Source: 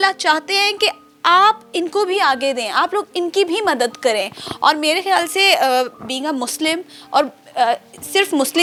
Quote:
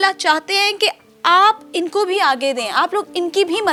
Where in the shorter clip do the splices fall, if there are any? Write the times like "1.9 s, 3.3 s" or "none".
none